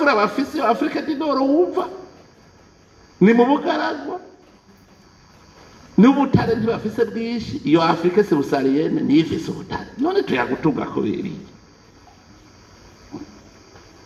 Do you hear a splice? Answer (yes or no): no